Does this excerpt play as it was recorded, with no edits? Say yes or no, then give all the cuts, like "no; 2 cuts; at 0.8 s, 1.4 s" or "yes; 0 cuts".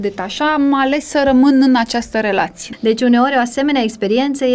no; 1 cut; at 2.6 s